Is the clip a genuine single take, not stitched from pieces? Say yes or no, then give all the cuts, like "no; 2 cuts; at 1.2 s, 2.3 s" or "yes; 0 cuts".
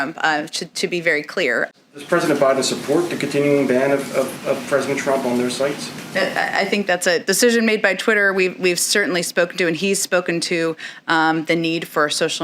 no; 1 cut; at 1.7 s